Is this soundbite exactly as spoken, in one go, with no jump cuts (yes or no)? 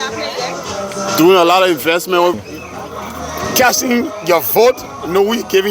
no